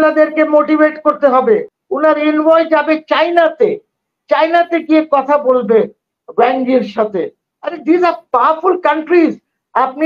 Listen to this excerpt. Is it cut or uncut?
cut